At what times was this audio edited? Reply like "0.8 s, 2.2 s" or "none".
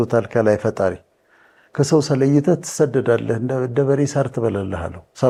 none